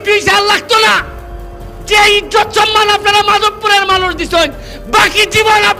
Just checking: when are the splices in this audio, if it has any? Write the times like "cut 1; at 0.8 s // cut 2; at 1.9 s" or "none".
none